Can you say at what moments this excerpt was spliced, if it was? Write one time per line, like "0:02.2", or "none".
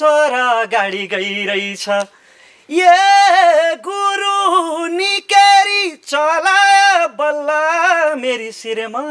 none